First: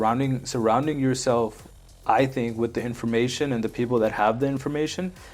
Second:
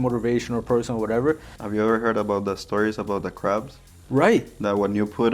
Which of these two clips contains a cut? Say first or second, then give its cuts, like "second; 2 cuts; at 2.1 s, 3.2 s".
second; 1 cut; at 1.5 s